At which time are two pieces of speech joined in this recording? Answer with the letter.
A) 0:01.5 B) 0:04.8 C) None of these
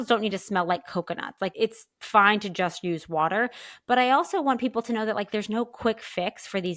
A